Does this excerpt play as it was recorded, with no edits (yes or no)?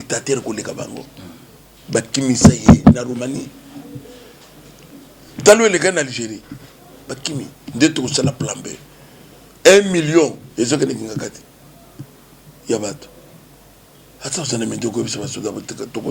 yes